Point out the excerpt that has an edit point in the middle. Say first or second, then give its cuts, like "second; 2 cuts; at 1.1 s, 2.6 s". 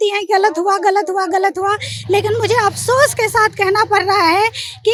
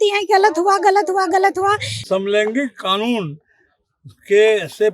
second; 1 cut; at 1.9 s